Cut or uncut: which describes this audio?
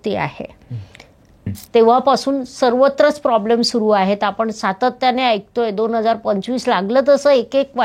cut